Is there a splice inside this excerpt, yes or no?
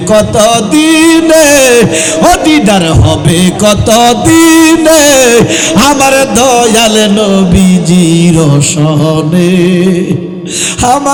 no